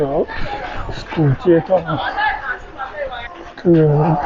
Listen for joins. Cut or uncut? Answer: cut